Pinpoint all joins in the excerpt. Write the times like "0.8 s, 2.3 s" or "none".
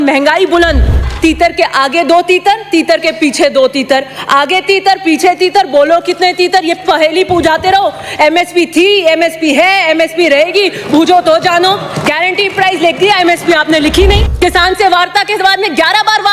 1.1 s, 14.3 s